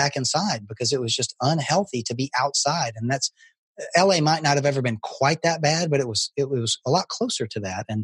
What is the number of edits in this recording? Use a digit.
0